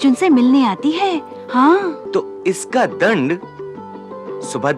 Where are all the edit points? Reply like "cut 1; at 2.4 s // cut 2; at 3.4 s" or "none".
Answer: cut 1; at 2.0 s